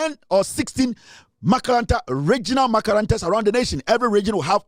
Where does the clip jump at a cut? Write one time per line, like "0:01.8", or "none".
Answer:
none